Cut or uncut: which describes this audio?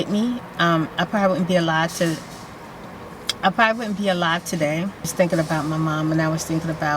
cut